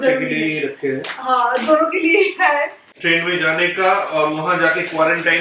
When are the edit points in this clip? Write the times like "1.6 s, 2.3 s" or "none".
2.9 s